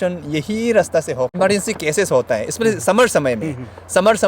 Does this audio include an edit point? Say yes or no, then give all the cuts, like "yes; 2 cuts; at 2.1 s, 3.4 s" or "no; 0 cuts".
yes; 1 cut; at 1.3 s